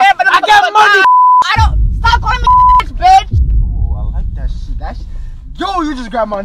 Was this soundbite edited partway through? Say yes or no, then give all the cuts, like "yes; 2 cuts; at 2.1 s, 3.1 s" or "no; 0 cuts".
no; 0 cuts